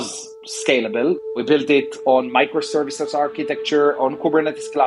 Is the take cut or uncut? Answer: cut